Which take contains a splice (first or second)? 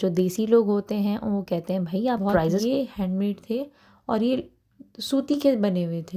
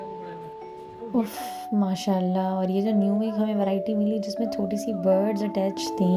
first